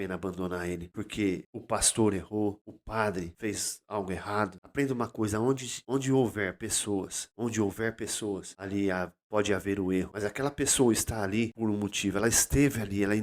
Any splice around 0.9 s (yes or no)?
yes